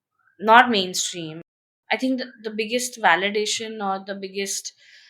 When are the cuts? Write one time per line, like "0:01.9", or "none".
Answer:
0:01.7